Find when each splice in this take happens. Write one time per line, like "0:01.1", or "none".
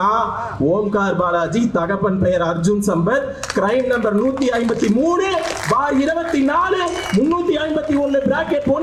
none